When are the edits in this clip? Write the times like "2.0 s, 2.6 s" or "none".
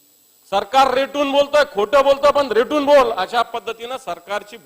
none